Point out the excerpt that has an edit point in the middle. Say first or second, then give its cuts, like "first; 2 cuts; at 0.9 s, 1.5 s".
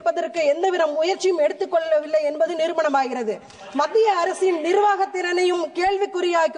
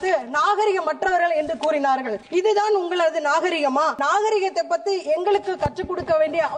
second; 2 cuts; at 2.2 s, 4.0 s